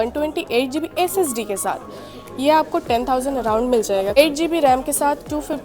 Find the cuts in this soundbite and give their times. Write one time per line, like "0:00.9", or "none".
0:04.2